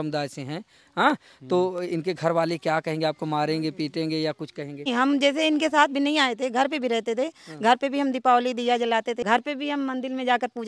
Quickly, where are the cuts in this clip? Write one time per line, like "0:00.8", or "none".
0:04.9
0:09.2